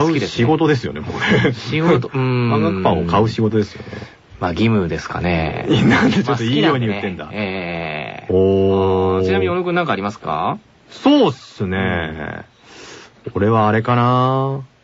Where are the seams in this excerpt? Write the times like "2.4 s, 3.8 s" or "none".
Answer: 1.8 s